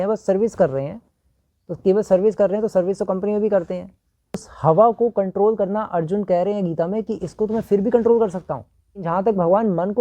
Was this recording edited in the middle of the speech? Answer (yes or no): yes